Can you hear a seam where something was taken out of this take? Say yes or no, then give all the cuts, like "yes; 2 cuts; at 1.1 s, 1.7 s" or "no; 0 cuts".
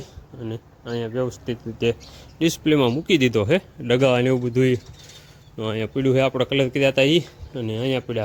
no; 0 cuts